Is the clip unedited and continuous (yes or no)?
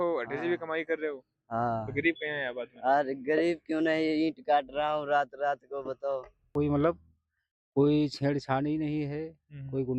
no